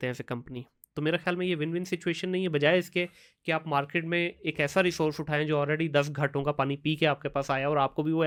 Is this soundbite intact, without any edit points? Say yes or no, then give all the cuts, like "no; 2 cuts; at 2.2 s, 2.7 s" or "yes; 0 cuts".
yes; 0 cuts